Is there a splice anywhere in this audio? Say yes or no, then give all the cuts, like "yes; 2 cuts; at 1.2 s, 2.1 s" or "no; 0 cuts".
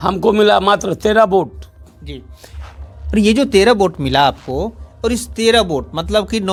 no; 0 cuts